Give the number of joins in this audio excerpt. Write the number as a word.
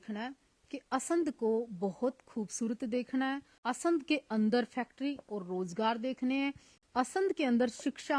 one